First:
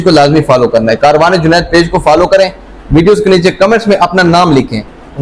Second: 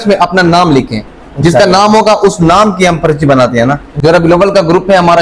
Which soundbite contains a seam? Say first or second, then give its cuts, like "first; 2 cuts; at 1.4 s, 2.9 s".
second; 1 cut; at 3.9 s